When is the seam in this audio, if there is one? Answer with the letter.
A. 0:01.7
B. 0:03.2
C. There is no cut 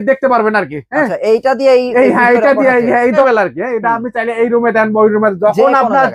B